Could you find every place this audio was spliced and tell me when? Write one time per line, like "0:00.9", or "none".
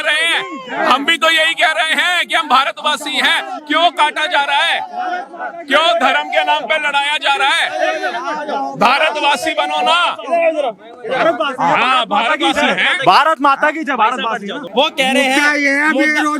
none